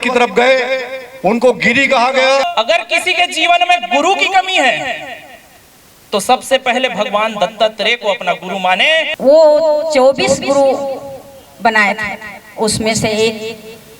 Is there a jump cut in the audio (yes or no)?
yes